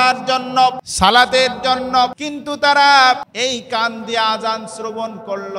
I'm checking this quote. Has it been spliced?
yes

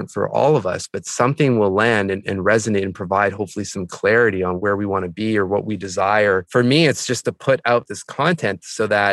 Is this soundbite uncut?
no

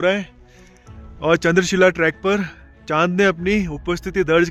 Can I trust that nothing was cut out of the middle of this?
yes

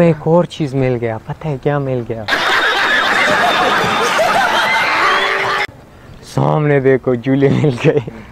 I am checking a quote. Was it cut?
yes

